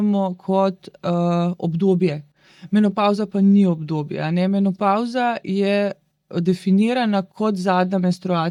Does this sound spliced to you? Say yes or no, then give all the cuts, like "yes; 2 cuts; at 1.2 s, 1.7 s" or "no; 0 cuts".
no; 0 cuts